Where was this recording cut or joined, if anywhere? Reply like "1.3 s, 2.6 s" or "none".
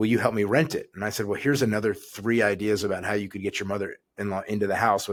none